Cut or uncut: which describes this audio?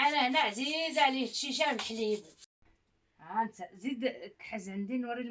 cut